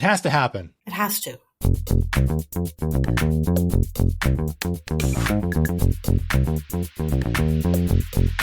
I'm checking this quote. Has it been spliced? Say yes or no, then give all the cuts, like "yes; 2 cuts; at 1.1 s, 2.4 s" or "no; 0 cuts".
yes; 1 cut; at 1.0 s